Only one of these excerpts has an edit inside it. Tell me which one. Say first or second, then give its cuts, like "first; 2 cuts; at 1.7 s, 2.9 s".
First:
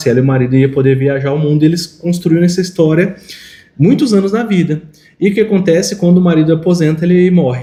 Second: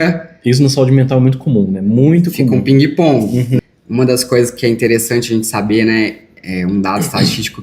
second; 1 cut; at 3.6 s